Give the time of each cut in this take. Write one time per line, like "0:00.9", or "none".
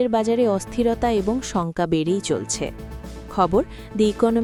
none